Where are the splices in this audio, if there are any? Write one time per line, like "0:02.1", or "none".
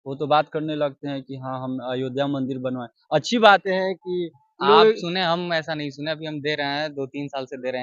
0:03.6